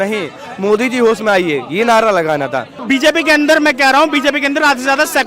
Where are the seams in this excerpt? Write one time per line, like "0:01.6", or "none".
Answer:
0:02.8